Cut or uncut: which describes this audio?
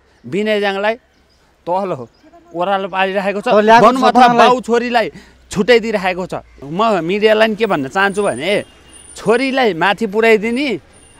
uncut